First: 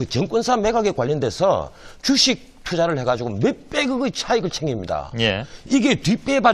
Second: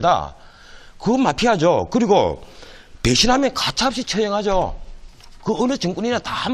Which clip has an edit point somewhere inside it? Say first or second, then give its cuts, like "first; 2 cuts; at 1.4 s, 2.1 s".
first; 1 cut; at 2.8 s